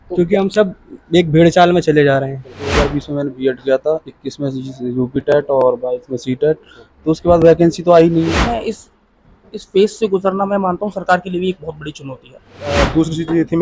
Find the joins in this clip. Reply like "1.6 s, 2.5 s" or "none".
2.7 s, 8.4 s, 12.8 s